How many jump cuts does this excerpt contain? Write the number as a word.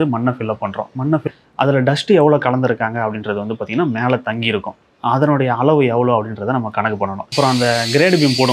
two